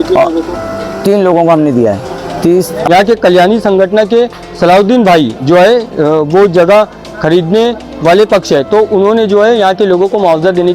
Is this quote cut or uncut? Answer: cut